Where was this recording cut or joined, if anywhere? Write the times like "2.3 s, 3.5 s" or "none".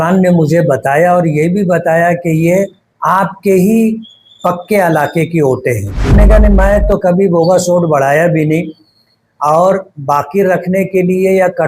6.1 s